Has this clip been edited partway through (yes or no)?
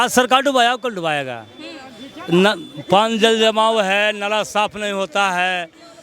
no